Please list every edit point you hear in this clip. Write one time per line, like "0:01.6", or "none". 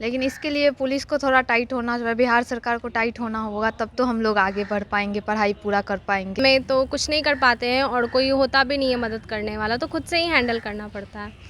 0:06.4